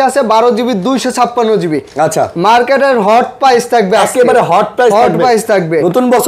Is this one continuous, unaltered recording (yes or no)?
yes